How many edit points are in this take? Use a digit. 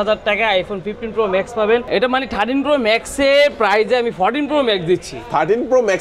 1